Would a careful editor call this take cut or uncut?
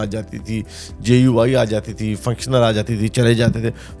uncut